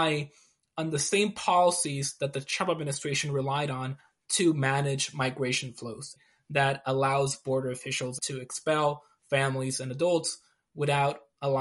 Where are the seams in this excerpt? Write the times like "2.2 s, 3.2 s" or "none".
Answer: 6.2 s, 8.2 s